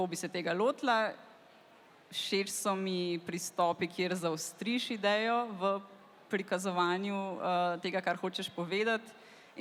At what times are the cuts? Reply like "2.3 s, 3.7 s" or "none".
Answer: none